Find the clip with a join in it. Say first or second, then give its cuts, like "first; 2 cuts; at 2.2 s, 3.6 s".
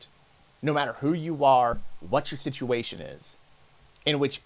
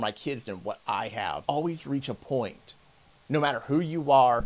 second; 1 cut; at 1.4 s